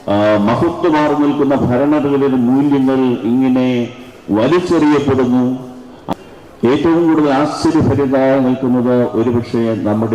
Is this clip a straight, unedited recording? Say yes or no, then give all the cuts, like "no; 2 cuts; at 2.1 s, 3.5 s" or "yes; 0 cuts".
no; 1 cut; at 5.9 s